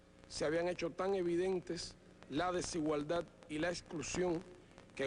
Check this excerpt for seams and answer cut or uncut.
uncut